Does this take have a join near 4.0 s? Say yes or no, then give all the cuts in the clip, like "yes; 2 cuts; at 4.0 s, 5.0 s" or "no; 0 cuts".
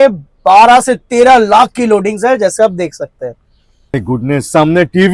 yes; 1 cut; at 4.0 s